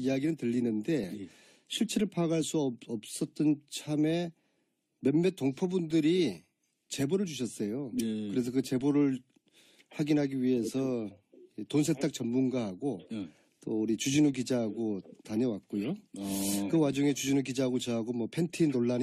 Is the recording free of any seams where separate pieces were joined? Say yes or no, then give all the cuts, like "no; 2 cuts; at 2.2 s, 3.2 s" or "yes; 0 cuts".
no; 1 cut; at 12.6 s